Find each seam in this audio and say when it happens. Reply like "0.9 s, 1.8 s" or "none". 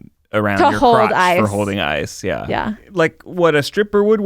2.8 s